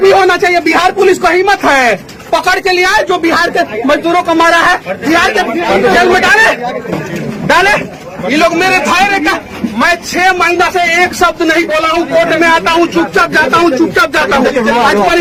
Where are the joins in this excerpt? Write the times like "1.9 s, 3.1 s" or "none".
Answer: none